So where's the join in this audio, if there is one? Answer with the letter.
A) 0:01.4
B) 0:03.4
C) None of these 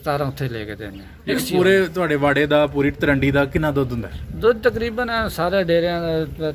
A